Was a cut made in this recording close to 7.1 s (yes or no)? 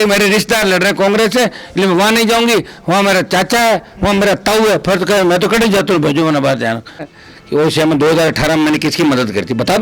yes